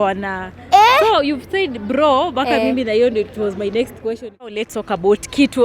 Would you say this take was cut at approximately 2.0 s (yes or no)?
no